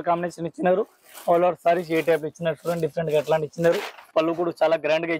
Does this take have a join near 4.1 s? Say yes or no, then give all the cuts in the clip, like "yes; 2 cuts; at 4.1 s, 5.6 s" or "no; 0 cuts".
yes; 1 cut; at 4.1 s